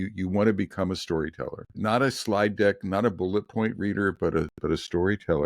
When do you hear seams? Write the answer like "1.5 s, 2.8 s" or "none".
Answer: 1.8 s